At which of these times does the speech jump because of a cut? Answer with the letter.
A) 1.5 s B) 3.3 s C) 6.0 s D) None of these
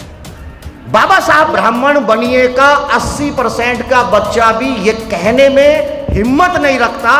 A